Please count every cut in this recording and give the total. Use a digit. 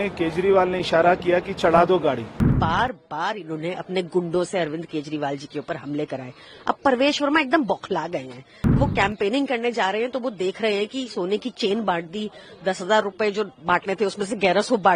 2